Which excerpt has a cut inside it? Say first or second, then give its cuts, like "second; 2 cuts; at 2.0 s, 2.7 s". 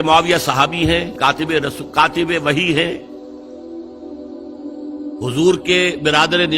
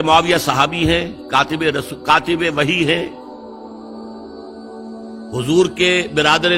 first; 1 cut; at 1.1 s